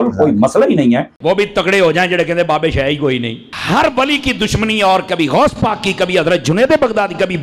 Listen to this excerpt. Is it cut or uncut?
cut